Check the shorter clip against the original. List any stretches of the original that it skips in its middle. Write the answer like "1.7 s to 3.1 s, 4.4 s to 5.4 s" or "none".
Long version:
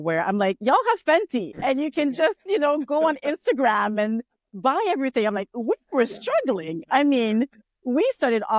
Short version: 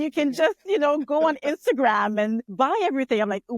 4.3 s to 4.5 s